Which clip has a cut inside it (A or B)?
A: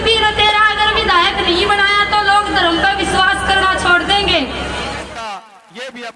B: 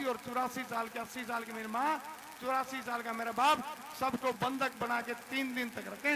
A